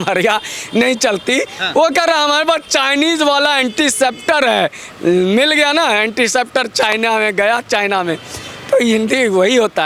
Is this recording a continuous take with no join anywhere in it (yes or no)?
yes